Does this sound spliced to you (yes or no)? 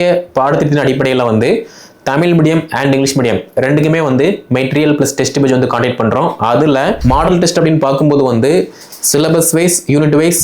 yes